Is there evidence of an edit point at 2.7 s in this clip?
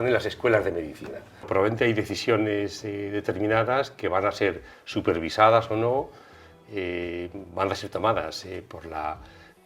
no; 1 cut; at 1.5 s

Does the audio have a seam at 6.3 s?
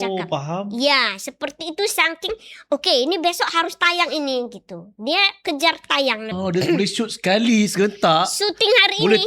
yes; 1 cut; at 6.3 s

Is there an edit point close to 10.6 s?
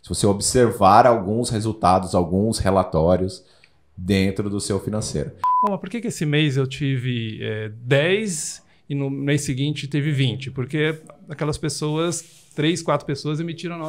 no; 1 cut; at 5.4 s

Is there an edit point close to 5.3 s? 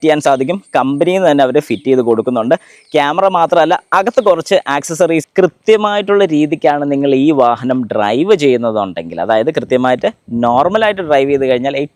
yes; 1 cut; at 5.3 s

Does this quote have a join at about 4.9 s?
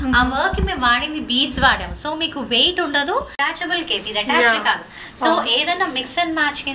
no; 1 cut; at 3.4 s

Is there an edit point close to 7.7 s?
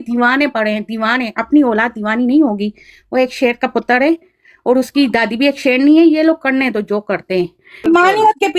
yes; 1 cut; at 7.7 s

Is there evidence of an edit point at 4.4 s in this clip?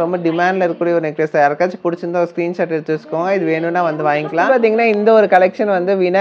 yes; 1 cut; at 4.4 s

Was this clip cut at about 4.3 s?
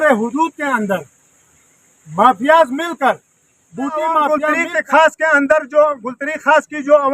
yes; 1 cut; at 4.3 s

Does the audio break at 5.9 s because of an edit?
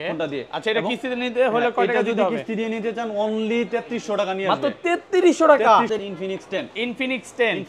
yes; 1 cut; at 5.9 s

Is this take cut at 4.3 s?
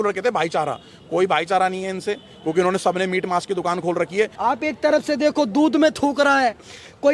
yes; 1 cut; at 4.3 s

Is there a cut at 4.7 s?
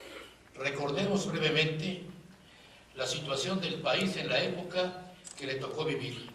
yes; 1 cut; at 4.7 s

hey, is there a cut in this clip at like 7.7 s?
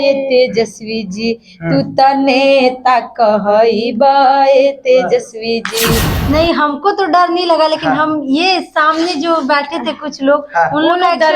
no; 1 cut; at 6.1 s

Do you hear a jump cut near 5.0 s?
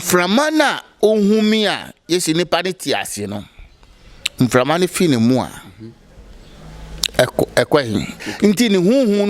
no; 1 cut; at 8.2 s

